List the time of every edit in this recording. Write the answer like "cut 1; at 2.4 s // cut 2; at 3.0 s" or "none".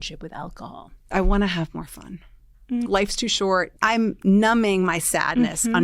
cut 1; at 1.1 s // cut 2; at 3.8 s